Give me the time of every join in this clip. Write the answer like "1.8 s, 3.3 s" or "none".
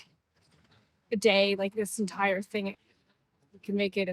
2.8 s